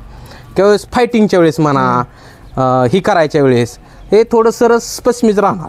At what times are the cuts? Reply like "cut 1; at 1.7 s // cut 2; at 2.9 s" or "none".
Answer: none

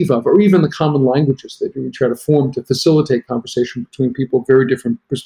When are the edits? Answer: none

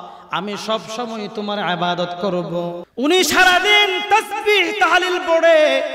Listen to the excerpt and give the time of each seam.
cut 1; at 2.8 s

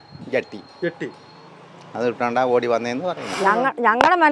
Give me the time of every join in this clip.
cut 1; at 3.3 s

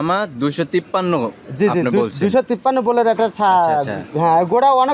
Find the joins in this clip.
none

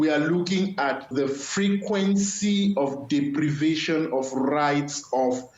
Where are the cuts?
cut 1; at 1.1 s

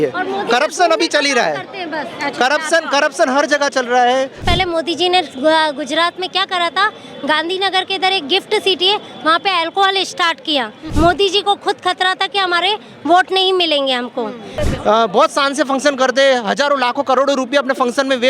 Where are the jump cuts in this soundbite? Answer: cut 1; at 4.4 s // cut 2; at 10.8 s // cut 3; at 14.5 s

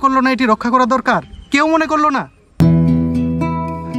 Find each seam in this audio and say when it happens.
cut 1; at 2.4 s

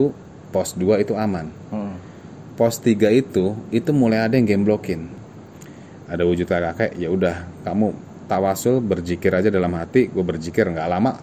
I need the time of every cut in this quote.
cut 1; at 5.1 s

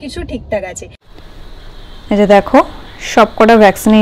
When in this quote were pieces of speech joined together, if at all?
cut 1; at 1.4 s

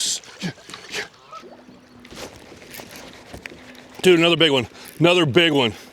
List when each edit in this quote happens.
cut 1; at 1.4 s

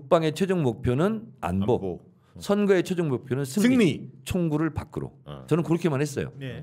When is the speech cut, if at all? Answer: none

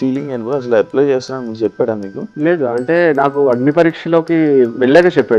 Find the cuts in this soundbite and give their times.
cut 1; at 2.2 s

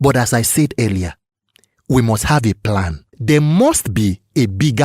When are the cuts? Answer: cut 1; at 3.1 s

